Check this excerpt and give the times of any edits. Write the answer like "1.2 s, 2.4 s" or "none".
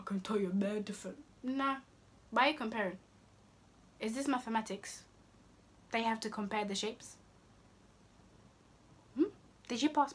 none